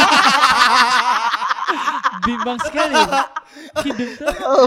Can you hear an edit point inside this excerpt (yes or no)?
no